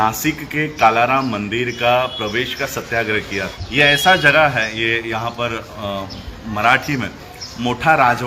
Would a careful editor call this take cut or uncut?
cut